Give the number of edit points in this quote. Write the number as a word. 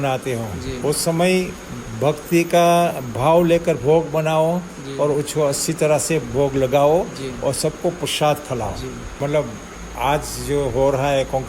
one